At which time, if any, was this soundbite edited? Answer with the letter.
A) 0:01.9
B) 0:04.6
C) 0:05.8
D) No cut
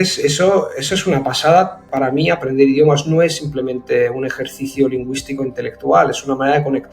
A